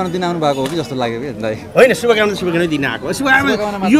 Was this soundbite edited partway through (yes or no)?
no